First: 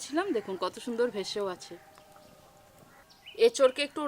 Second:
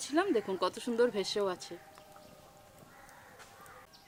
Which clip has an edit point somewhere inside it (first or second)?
first